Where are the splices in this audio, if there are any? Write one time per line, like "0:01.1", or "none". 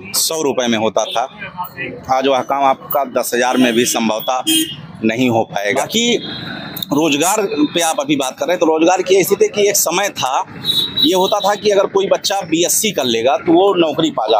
0:05.8